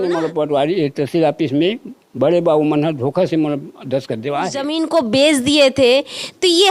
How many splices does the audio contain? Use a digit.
1